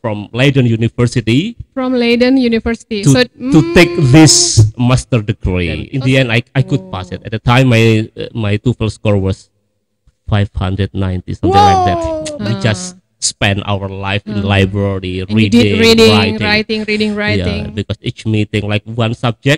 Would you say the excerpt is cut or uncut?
cut